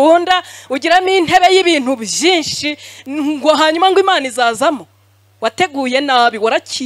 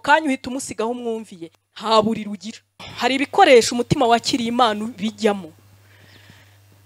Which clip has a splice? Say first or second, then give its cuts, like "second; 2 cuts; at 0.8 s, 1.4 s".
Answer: second; 1 cut; at 2.9 s